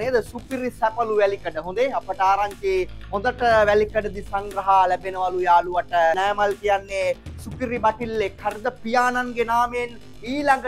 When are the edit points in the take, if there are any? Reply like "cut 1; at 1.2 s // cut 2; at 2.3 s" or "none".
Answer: cut 1; at 6.2 s